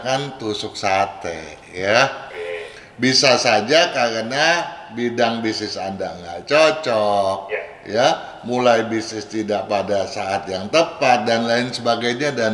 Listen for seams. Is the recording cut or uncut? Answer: uncut